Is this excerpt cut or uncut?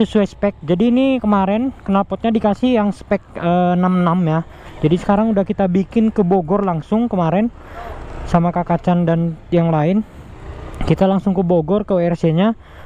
uncut